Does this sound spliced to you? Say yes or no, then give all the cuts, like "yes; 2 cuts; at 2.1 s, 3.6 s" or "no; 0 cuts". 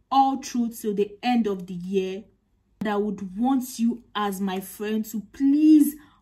yes; 1 cut; at 2.8 s